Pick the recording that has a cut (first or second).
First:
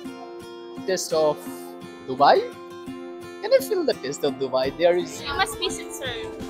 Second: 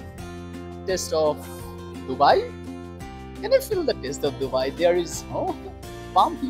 first